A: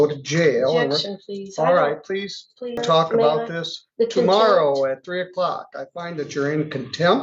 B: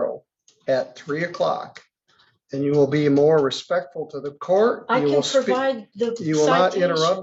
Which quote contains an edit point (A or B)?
A